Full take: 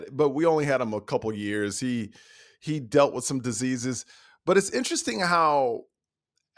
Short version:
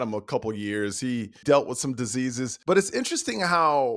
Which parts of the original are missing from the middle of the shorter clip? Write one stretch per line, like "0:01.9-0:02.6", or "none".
0:02.2-0:02.8
0:04.0-0:04.3